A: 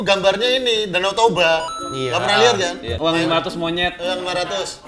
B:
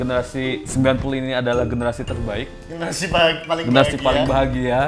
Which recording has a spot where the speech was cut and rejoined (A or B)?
A